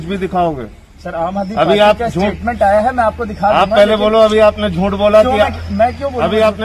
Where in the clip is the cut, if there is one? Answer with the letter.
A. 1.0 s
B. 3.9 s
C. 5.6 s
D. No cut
D